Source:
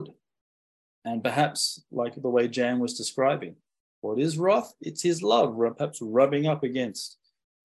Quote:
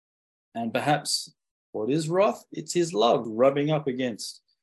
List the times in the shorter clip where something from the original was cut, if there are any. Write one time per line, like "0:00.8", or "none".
0:01.3
0:03.2